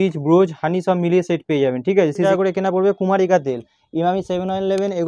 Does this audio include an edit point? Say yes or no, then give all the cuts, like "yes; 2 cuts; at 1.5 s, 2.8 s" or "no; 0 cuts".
yes; 1 cut; at 2.3 s